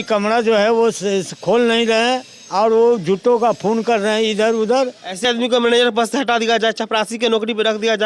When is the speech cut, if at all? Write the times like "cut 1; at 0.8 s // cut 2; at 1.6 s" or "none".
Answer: cut 1; at 5.2 s